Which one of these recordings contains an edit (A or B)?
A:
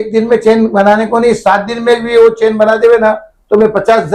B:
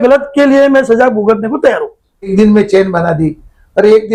B